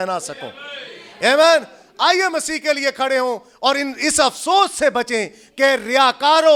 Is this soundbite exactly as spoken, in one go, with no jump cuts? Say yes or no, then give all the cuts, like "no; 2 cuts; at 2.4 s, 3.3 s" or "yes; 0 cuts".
yes; 0 cuts